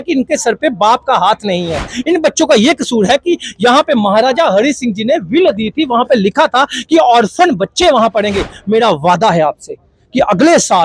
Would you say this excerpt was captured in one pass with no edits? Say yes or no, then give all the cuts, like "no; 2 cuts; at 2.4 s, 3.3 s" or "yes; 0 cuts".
yes; 0 cuts